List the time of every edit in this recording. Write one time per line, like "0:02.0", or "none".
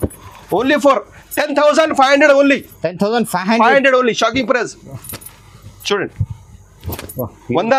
none